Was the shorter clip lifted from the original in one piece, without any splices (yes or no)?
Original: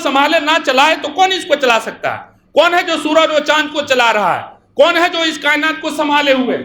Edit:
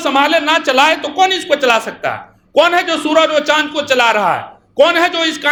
yes